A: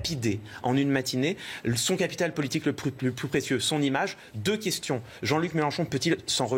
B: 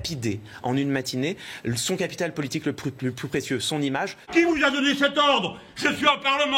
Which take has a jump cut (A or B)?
B